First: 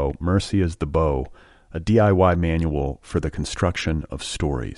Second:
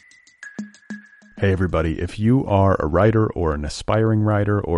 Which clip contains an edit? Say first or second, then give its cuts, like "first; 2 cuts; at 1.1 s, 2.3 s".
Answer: second; 1 cut; at 0.9 s